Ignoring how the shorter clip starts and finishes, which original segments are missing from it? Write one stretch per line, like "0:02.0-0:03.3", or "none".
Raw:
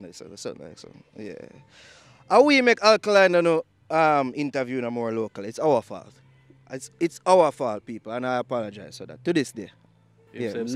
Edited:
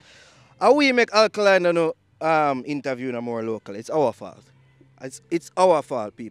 none